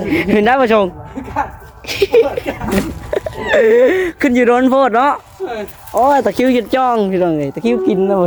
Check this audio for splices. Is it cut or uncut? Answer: uncut